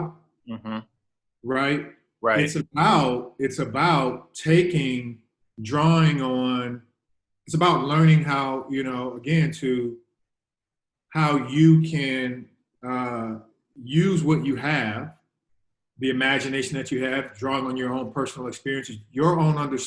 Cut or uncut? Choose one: uncut